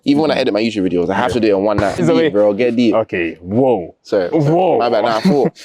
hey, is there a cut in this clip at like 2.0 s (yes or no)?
yes